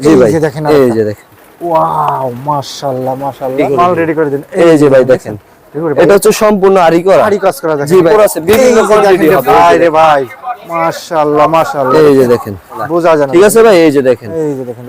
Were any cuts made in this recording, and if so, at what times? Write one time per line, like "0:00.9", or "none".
0:03.6
0:08.1
0:12.8